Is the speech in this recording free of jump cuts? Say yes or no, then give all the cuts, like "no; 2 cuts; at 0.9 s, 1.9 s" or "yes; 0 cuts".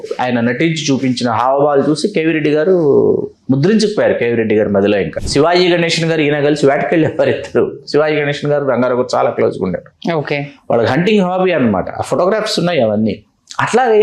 no; 1 cut; at 5.2 s